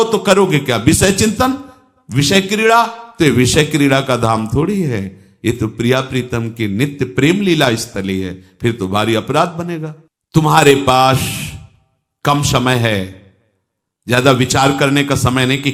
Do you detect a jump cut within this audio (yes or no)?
no